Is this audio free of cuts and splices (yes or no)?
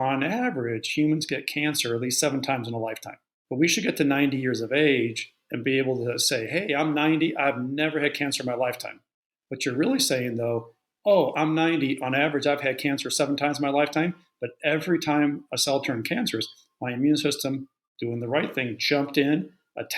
yes